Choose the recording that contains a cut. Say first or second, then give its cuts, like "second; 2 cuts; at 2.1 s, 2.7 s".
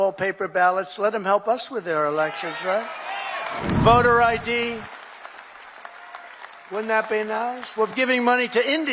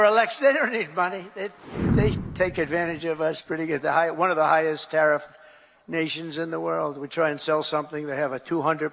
first; 1 cut; at 3.6 s